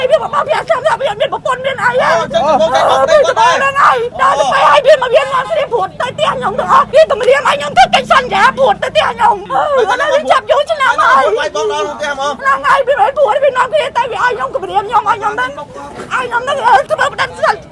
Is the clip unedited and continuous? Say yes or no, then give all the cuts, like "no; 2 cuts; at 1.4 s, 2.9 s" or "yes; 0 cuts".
no; 4 cuts; at 4.1 s, 6.9 s, 9.4 s, 16.9 s